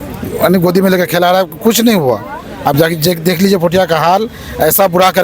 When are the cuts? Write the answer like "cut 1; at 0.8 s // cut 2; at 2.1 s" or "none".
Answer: none